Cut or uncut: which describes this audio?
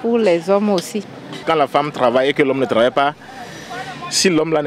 cut